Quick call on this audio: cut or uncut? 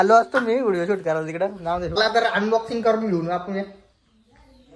cut